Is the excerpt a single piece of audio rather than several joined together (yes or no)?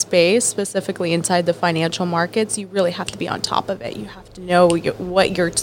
yes